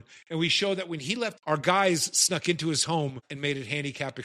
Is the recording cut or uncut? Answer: cut